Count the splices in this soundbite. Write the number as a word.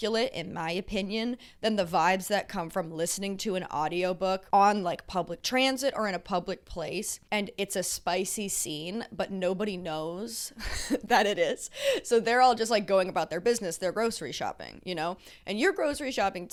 zero